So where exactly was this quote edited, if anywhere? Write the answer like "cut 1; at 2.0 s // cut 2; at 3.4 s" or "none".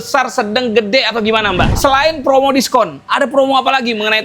cut 1; at 1.7 s